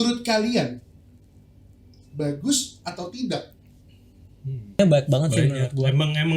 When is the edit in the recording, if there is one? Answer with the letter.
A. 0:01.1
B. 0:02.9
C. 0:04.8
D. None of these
C